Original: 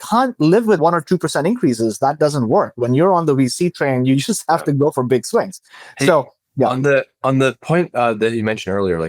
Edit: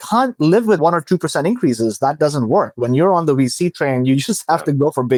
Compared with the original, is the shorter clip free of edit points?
yes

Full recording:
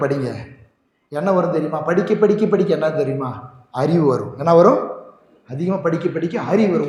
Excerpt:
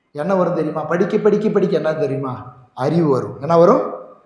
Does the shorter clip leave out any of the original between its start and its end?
no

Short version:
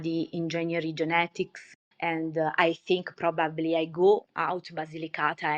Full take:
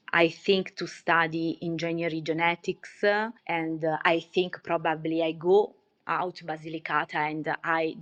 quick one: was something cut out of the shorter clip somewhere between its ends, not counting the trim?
yes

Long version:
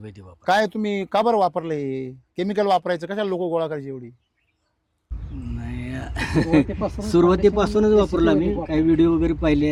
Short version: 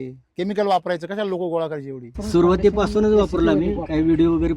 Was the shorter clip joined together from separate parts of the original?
yes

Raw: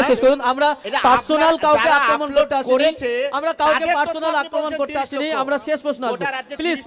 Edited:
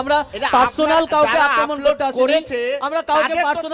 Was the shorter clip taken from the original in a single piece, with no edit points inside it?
yes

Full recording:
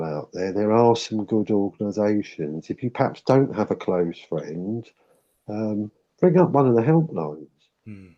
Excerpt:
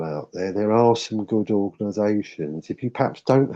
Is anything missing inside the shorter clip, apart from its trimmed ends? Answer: no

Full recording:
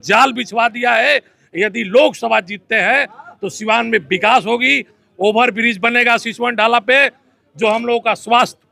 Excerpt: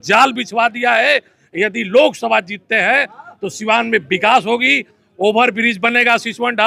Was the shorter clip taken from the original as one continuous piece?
yes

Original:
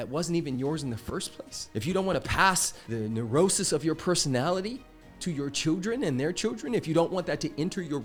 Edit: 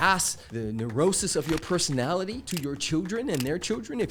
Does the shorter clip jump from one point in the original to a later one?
yes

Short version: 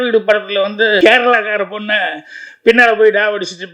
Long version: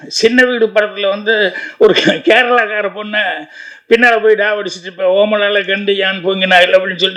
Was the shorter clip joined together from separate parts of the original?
yes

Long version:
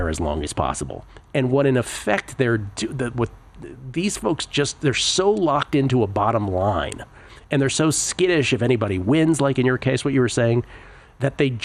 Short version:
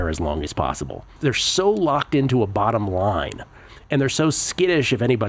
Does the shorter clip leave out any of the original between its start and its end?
yes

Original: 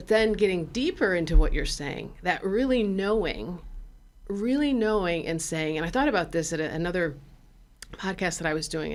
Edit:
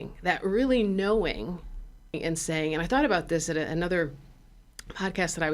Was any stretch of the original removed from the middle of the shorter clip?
yes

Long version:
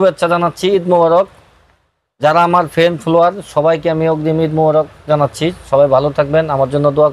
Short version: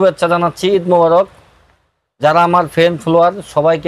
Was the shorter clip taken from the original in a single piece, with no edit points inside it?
yes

